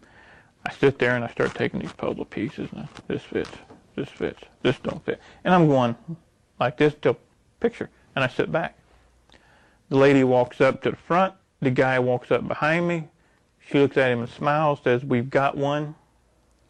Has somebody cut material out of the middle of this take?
no; 0 cuts

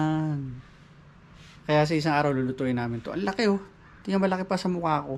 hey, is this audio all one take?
yes; 0 cuts

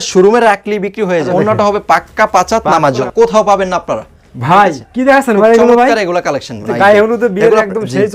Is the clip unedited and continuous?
no; 2 cuts; at 1.3 s, 3.0 s

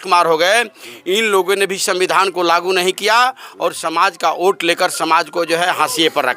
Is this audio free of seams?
yes; 0 cuts

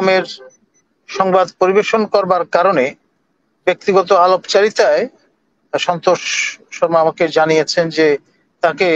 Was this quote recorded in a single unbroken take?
yes; 0 cuts

